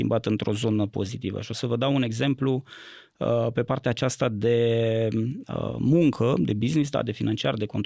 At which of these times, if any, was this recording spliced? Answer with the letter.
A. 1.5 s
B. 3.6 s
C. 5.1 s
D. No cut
D